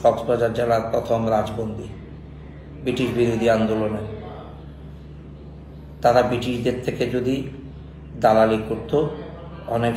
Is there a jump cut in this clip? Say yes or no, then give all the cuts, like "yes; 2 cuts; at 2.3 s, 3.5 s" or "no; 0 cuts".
no; 0 cuts